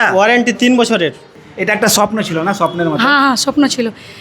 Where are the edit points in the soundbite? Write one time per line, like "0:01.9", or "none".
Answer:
0:01.3